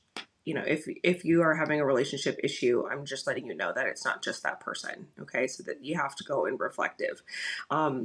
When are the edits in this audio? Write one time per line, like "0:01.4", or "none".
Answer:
none